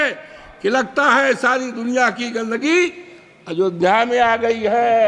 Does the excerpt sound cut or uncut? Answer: uncut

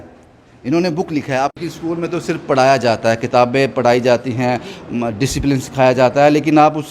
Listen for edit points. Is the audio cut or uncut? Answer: cut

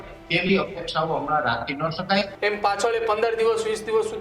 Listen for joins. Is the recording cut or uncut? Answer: cut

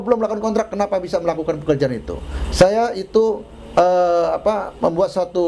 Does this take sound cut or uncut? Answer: uncut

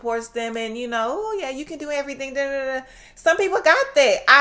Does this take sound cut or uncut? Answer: uncut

